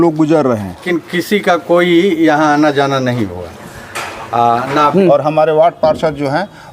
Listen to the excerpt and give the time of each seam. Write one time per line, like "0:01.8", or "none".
0:00.8
0:04.9